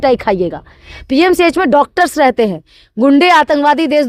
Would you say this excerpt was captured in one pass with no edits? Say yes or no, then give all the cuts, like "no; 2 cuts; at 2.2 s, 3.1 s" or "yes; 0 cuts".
yes; 0 cuts